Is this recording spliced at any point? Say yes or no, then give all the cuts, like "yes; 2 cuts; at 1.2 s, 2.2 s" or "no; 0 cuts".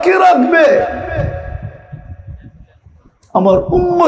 no; 0 cuts